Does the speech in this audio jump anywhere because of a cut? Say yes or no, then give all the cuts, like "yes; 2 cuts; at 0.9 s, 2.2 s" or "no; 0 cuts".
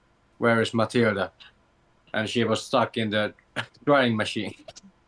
no; 0 cuts